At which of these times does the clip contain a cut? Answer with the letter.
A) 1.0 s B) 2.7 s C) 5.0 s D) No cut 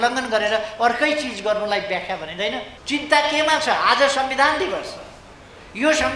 B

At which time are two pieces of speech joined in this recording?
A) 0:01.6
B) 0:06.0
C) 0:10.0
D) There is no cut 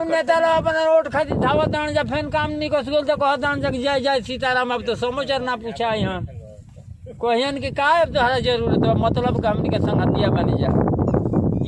D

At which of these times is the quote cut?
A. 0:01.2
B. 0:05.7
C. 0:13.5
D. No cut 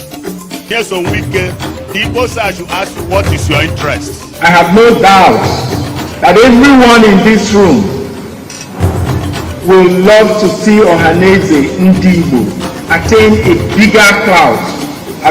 A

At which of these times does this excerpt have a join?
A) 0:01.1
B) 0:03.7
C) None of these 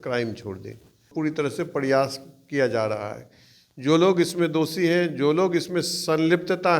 A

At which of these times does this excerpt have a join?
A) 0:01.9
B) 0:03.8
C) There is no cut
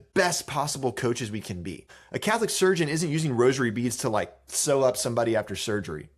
A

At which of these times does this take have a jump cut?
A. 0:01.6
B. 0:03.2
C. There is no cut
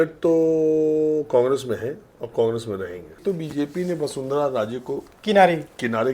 B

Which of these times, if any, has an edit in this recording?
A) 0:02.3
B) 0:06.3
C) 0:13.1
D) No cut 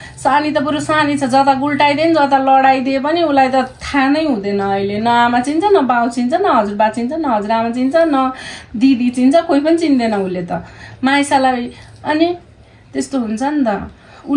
D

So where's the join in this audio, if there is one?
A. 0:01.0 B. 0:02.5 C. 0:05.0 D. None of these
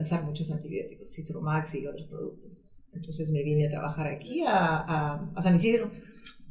D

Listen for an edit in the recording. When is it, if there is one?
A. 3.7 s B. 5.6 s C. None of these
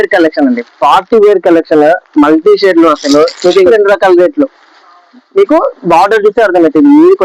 A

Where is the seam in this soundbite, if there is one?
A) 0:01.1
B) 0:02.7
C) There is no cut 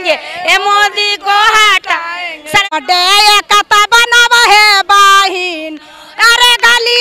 B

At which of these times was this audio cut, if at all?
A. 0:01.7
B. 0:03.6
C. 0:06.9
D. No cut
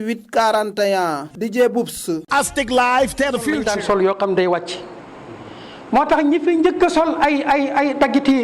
B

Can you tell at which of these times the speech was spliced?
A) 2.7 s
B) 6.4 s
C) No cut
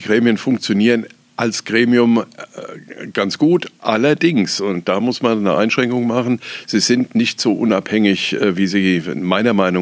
C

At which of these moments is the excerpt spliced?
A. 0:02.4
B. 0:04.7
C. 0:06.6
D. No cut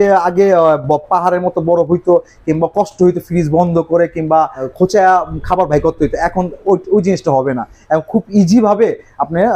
B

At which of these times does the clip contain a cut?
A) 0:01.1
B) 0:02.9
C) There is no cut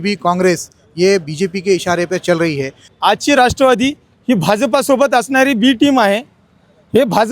B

